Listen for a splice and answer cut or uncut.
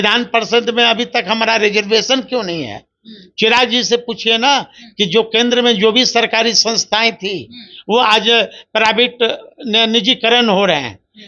uncut